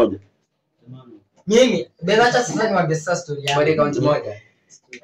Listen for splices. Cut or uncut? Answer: uncut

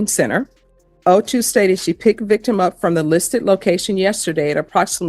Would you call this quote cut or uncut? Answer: uncut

